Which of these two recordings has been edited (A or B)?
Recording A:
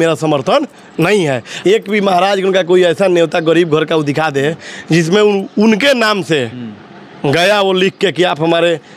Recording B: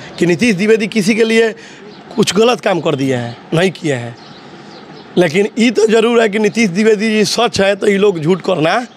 A